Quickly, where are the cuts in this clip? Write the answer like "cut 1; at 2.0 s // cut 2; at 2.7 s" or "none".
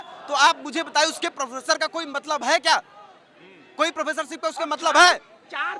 none